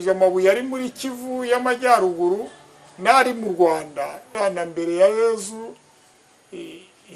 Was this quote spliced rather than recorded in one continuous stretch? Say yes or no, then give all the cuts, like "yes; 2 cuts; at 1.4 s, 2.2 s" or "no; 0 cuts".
yes; 1 cut; at 4.4 s